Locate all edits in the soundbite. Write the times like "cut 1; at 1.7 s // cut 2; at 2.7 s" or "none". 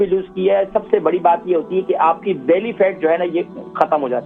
none